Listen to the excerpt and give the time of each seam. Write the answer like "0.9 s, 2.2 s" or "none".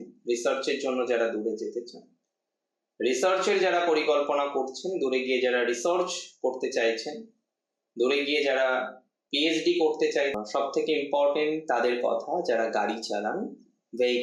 10.4 s